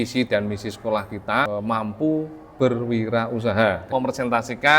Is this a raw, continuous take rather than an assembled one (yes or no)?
no